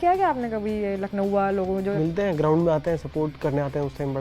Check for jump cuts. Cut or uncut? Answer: cut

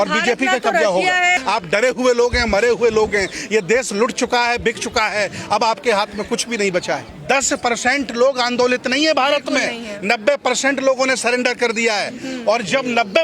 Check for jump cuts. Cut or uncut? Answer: cut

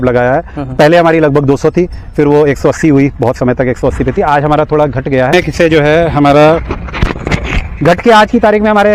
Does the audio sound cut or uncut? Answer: uncut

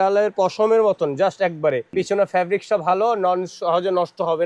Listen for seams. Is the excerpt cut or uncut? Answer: cut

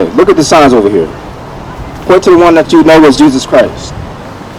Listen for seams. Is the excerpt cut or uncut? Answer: uncut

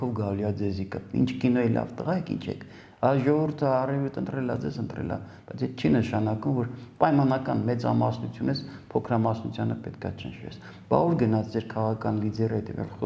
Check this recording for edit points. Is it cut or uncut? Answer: uncut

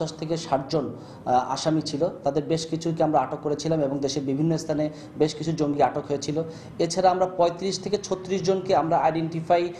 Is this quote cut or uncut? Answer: uncut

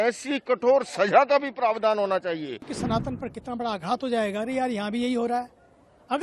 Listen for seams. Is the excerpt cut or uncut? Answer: cut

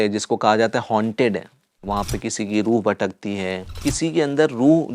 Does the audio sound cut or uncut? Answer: cut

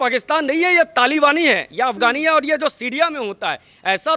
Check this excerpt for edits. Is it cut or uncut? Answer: uncut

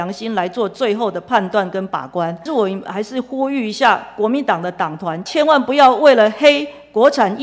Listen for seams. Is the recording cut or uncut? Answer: cut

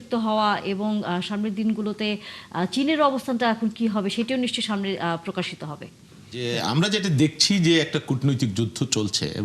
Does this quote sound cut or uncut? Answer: cut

